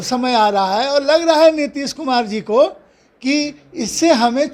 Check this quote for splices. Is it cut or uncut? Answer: uncut